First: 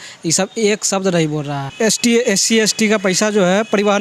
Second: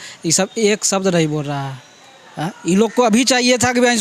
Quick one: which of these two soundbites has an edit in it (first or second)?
first